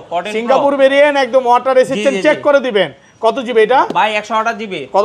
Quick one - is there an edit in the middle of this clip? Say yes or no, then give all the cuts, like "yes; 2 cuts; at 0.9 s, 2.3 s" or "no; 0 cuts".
no; 0 cuts